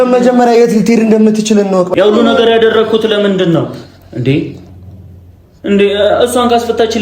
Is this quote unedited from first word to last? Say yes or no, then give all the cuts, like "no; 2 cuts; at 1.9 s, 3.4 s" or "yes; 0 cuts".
no; 1 cut; at 1.9 s